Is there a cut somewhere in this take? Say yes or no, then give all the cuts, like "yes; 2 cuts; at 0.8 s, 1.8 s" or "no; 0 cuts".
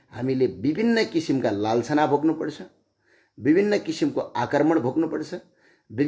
no; 0 cuts